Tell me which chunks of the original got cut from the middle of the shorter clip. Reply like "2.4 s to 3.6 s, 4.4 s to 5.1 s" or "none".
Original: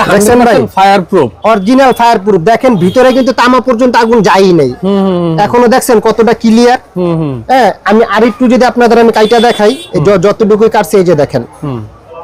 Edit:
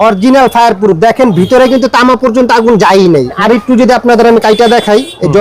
4.8 s to 8.1 s